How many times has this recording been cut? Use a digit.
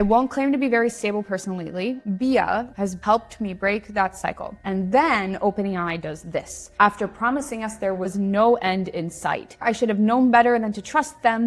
2